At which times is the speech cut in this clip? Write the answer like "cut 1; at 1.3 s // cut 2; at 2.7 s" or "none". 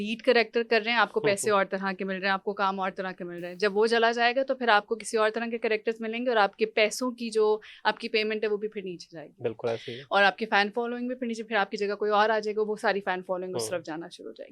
none